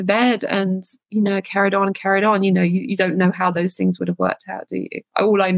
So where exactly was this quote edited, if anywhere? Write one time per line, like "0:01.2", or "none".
0:00.9